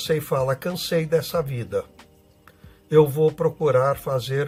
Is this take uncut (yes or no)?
yes